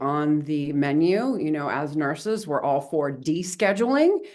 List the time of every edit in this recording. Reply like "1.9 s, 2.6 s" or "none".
none